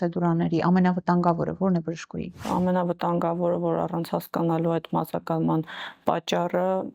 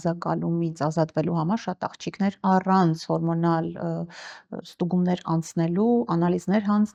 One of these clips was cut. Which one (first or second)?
first